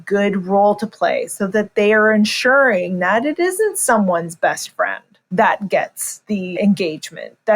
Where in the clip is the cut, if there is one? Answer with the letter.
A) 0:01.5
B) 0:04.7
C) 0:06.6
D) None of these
C